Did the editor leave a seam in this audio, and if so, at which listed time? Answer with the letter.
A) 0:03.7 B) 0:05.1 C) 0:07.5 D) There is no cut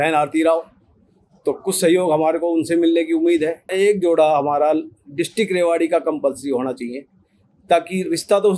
A